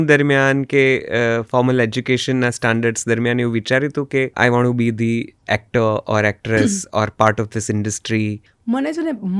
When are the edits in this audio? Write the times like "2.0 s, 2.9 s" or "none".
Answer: 4.3 s, 8.5 s

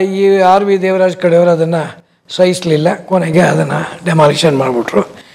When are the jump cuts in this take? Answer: none

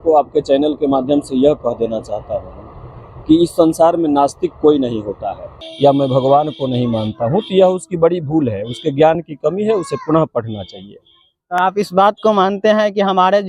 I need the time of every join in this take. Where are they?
5.6 s

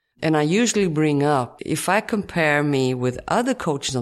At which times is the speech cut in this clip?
1.6 s

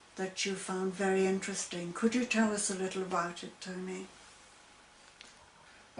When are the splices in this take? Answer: 3.2 s

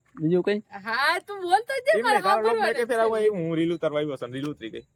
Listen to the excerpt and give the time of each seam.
none

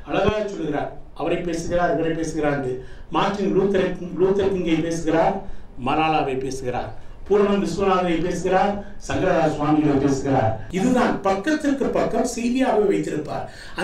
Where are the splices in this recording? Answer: 10.6 s

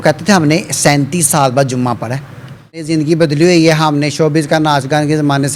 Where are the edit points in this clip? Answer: 2.8 s

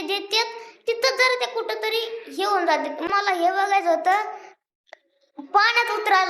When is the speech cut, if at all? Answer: 3.1 s

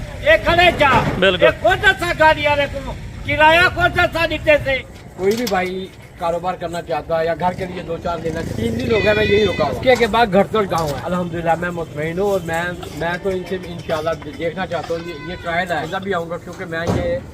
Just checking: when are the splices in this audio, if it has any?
4.9 s, 8.5 s, 9.8 s, 11.0 s, 15.9 s

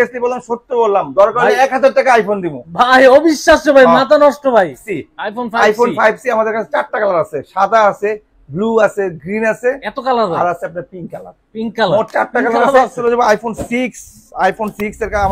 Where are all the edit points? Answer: 4.8 s, 13.0 s

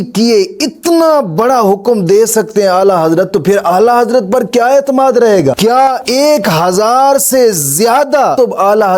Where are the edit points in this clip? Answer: none

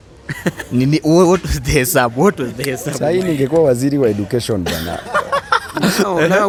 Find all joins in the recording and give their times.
none

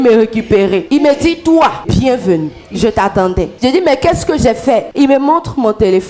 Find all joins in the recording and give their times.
0.8 s, 1.8 s, 3.5 s, 4.9 s

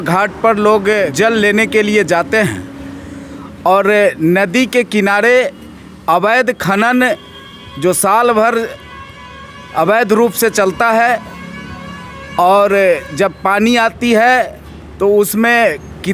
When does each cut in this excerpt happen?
1.1 s

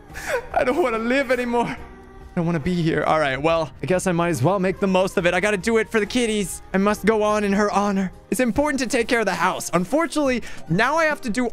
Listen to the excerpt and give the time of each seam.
6.6 s, 8.2 s

